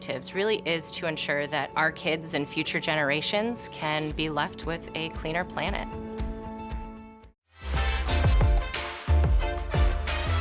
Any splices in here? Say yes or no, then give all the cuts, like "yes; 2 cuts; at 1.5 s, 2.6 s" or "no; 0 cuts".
no; 0 cuts